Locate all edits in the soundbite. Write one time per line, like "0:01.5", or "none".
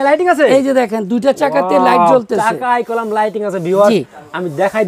none